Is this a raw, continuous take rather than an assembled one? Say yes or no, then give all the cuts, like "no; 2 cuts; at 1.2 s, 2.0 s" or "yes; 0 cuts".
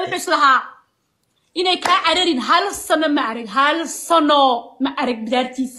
yes; 0 cuts